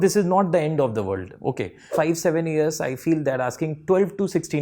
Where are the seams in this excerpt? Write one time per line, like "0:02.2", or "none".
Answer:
0:01.9